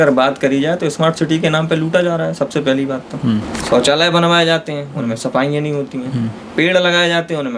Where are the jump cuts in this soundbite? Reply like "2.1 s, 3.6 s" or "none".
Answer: 3.5 s